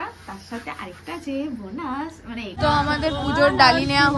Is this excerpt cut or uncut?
cut